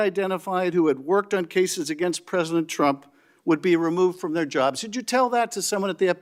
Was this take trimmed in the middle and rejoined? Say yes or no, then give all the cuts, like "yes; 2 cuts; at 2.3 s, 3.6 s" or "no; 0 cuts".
no; 0 cuts